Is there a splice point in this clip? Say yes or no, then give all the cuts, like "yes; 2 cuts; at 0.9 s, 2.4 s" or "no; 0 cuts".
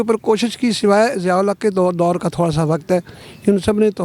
no; 0 cuts